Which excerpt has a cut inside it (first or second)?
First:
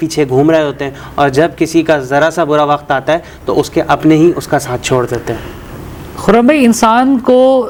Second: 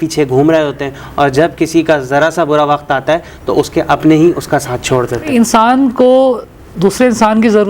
second